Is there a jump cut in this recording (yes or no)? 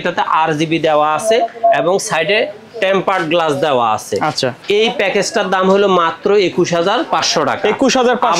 no